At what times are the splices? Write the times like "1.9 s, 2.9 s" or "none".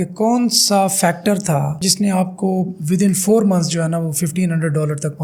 none